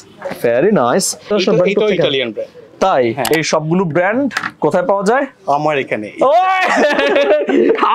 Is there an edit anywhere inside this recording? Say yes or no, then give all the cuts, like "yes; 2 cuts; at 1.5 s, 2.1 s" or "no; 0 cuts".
yes; 2 cuts; at 1.3 s, 3.3 s